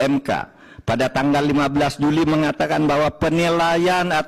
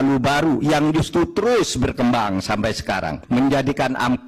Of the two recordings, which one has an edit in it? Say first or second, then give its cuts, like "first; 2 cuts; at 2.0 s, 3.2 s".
second; 1 cut; at 3.2 s